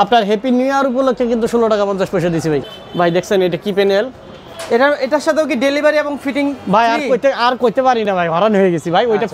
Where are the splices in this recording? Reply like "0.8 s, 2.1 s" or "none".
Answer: 2.6 s, 4.5 s